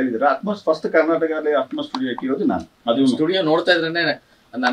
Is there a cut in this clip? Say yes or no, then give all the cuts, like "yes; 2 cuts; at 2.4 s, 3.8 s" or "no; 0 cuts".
no; 0 cuts